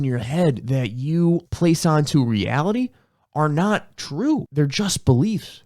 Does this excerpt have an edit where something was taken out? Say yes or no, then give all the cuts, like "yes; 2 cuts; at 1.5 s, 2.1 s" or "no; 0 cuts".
yes; 2 cuts; at 1.5 s, 4.5 s